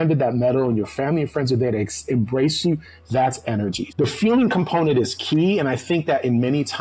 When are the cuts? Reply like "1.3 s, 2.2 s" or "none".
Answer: 3.9 s